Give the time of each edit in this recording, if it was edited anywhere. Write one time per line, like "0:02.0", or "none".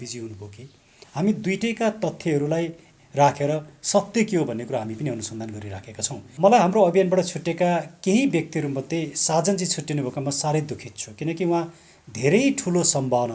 0:01.0
0:06.4